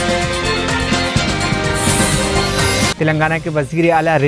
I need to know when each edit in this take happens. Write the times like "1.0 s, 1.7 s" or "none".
2.9 s